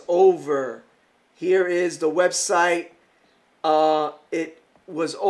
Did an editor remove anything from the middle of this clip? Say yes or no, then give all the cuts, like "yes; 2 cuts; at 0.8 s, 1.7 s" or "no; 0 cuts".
no; 0 cuts